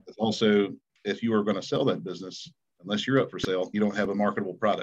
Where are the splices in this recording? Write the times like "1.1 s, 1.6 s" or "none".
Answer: 3.7 s